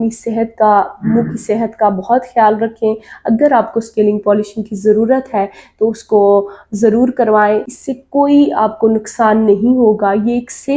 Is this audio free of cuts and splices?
yes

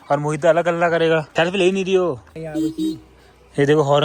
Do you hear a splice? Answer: no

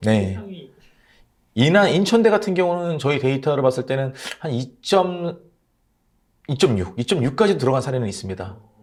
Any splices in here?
no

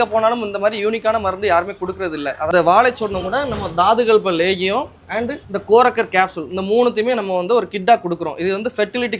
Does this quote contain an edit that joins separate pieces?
yes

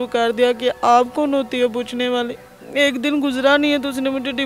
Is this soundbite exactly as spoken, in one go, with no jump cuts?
no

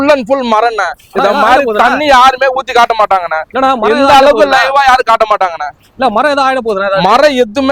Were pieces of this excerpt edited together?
no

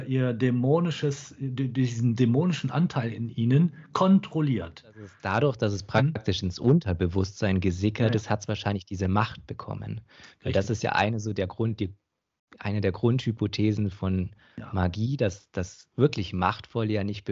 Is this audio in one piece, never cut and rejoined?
no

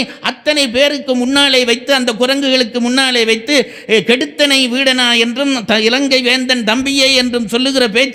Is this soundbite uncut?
yes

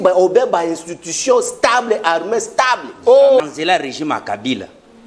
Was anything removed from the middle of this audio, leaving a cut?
yes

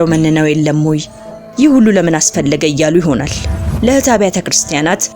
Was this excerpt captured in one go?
no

